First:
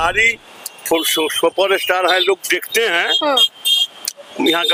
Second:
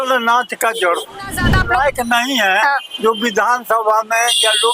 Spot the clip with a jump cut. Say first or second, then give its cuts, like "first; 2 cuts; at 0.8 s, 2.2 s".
second; 1 cut; at 1.5 s